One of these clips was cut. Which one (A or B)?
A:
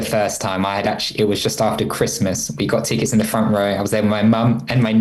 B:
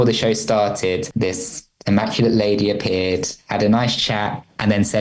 B